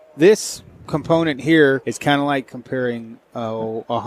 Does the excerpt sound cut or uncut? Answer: cut